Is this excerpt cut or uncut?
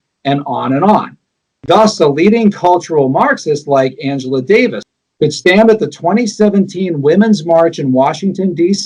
cut